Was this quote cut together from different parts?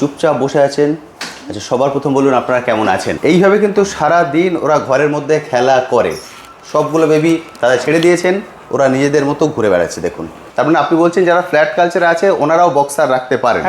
yes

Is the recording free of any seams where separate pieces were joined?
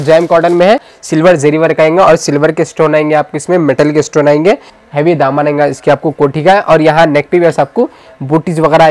no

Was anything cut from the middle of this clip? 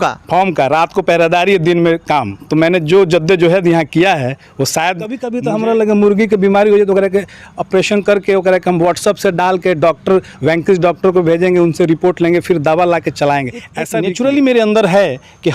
yes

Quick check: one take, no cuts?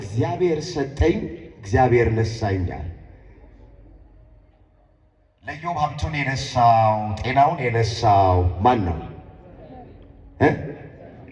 yes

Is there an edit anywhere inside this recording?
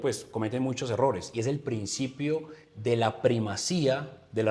no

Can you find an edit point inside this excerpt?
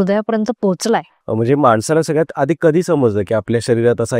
yes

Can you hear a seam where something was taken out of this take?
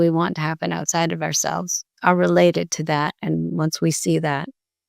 yes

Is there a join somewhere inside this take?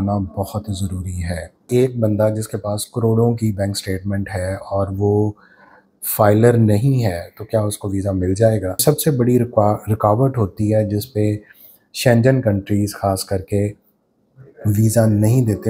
yes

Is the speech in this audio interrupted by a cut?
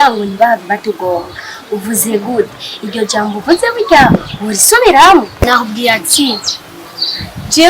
yes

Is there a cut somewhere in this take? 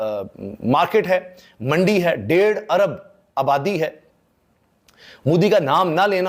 no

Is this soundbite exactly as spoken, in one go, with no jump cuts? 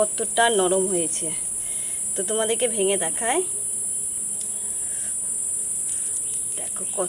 yes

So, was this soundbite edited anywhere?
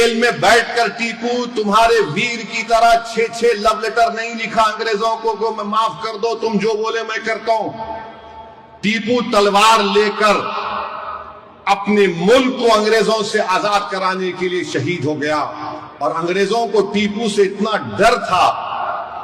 no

